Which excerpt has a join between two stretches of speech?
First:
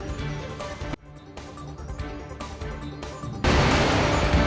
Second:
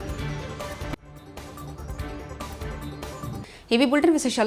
first; 1 cut; at 3.4 s

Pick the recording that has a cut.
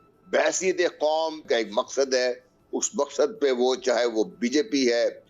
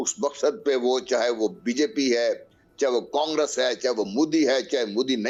first; 1 cut; at 1.4 s

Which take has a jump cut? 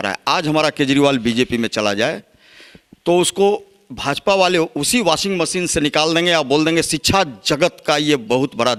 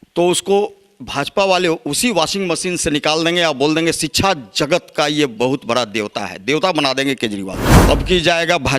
second; 1 cut; at 7.7 s

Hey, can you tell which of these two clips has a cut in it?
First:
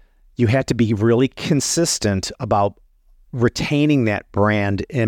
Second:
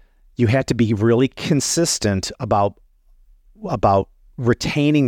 first; 1 cut; at 3.2 s

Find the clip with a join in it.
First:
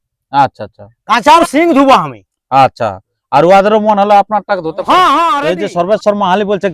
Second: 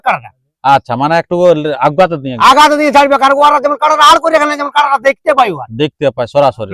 first; 2 cuts; at 1.4 s, 5.5 s

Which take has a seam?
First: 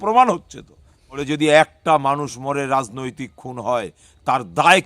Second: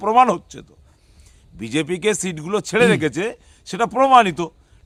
first; 1 cut; at 1.2 s

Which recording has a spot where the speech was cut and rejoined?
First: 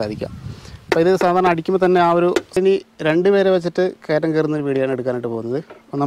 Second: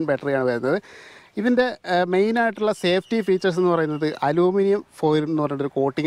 first; 1 cut; at 2.6 s

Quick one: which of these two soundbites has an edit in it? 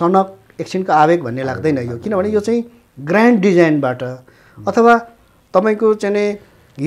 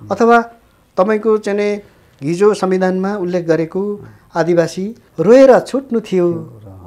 second; 1 cut; at 5.0 s

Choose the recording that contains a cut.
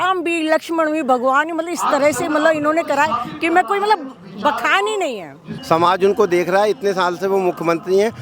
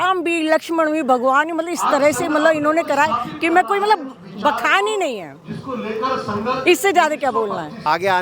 first; 1 cut; at 5.5 s

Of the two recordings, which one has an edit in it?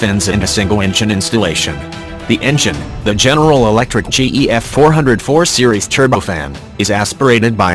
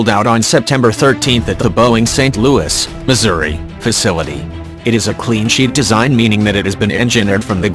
second; 1 cut; at 1.3 s

